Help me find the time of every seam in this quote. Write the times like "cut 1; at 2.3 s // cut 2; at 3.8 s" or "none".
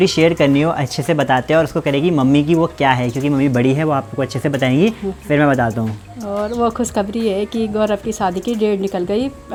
none

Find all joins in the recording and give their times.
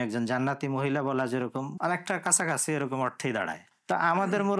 cut 1; at 1.7 s // cut 2; at 3.7 s

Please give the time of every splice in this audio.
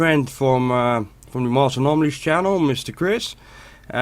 cut 1; at 1.2 s

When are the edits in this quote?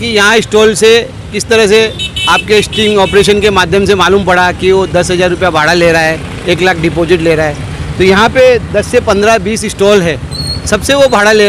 none

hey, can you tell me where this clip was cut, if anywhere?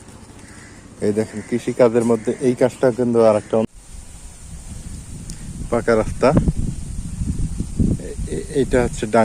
cut 1; at 3.7 s

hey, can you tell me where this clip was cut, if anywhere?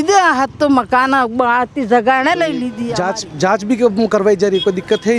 cut 1; at 2.8 s

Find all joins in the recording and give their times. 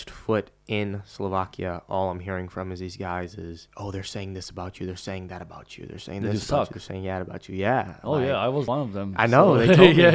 cut 1; at 3.7 s // cut 2; at 8.7 s

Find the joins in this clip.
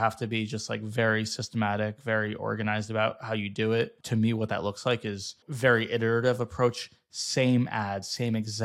cut 1; at 4.0 s // cut 2; at 5.4 s

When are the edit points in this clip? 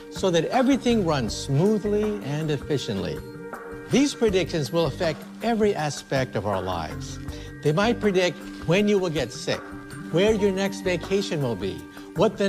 cut 1; at 8.5 s

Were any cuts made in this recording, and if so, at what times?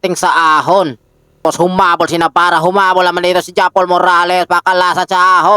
cut 1; at 1.4 s

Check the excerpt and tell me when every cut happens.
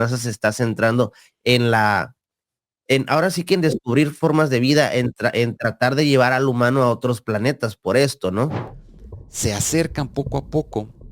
cut 1; at 8.7 s

